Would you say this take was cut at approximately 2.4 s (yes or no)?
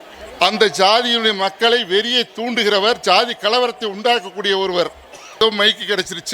no